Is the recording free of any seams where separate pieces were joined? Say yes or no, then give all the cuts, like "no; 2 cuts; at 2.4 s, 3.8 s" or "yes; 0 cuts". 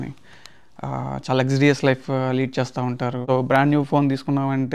no; 1 cut; at 3.2 s